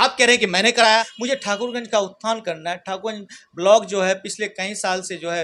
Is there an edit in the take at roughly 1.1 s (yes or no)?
yes